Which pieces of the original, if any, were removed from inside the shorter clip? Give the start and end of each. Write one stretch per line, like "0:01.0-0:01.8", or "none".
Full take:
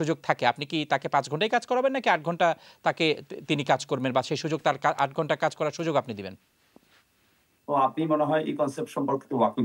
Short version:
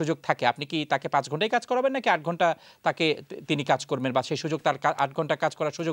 none